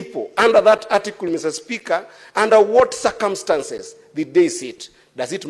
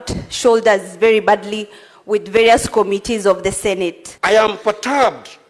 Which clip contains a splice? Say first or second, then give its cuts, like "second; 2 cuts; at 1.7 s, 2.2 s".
second; 1 cut; at 4.1 s